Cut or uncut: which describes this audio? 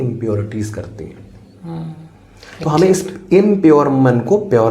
uncut